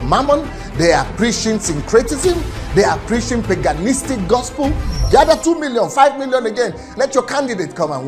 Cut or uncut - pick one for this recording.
cut